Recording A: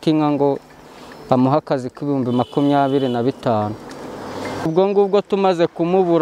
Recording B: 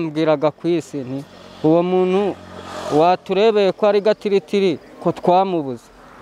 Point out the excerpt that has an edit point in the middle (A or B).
A